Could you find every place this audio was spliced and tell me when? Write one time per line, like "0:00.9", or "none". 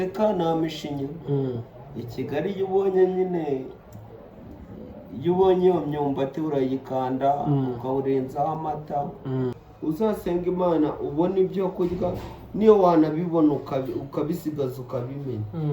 0:09.7